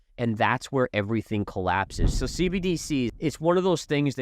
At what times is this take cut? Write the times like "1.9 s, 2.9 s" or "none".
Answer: 2.1 s, 3.1 s